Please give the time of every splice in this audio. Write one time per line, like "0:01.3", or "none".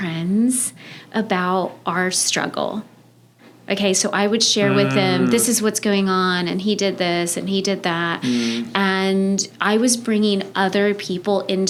none